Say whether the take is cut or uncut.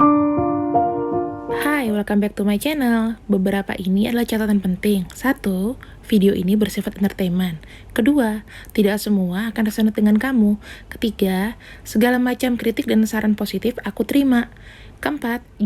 cut